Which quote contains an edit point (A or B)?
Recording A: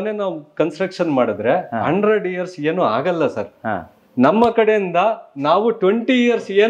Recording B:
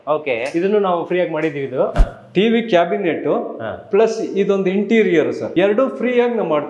B